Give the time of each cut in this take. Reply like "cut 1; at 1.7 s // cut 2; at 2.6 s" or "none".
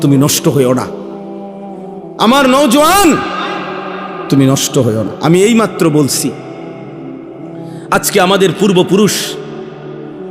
cut 1; at 0.9 s // cut 2; at 2.2 s // cut 3; at 6.4 s // cut 4; at 7.9 s

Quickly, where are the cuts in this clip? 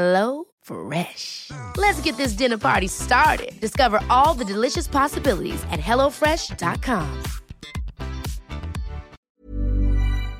cut 1; at 9.1 s

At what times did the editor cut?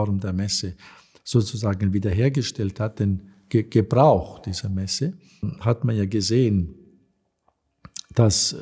cut 1; at 5.5 s

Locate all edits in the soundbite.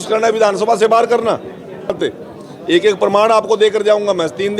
cut 1; at 1.9 s

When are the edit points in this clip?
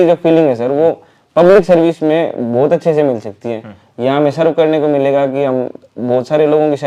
none

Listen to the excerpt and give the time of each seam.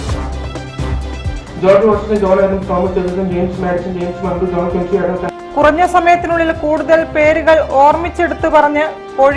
cut 1; at 1.4 s

